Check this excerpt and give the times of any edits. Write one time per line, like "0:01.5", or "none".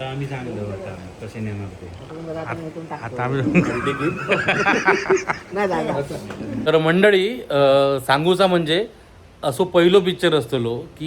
0:06.6